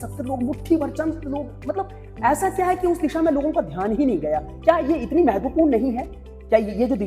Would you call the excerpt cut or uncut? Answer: uncut